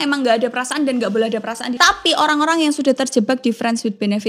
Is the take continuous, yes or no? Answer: no